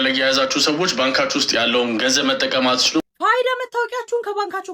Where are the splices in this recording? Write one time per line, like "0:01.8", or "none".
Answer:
0:03.0